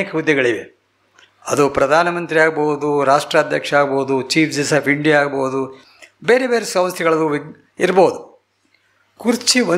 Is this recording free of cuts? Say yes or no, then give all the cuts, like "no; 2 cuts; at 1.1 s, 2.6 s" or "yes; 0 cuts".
yes; 0 cuts